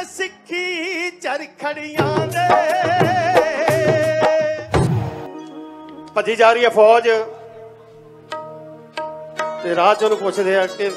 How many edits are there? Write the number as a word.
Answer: one